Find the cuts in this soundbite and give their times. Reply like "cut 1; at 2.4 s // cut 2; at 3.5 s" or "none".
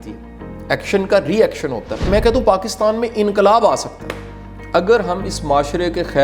cut 1; at 1.9 s